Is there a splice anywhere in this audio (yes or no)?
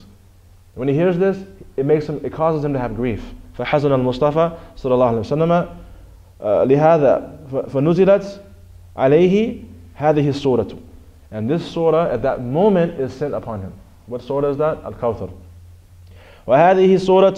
no